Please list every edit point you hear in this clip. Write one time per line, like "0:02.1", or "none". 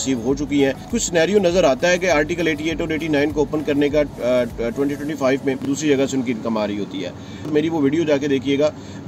0:00.9
0:05.6
0:07.5